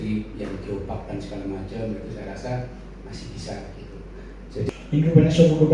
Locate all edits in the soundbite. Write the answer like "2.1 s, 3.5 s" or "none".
4.7 s